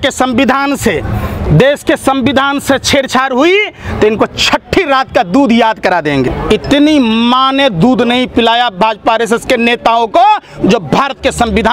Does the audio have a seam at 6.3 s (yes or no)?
yes